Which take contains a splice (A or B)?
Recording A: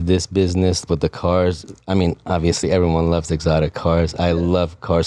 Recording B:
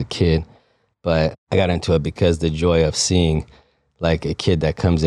B